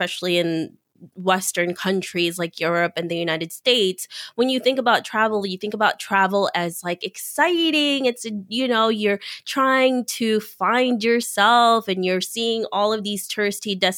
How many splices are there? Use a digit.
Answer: 0